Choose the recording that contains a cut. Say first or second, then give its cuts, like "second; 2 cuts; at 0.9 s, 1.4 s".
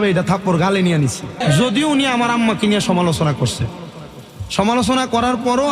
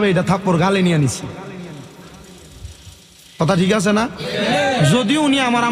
first; 1 cut; at 1.4 s